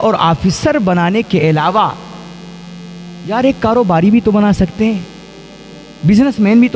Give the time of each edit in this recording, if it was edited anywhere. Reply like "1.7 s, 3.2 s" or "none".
none